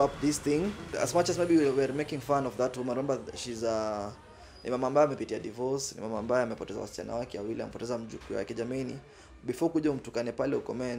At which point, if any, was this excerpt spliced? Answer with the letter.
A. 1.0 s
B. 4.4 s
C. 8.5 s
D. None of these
A